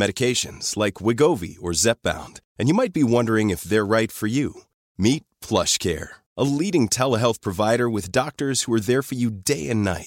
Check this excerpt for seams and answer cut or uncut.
uncut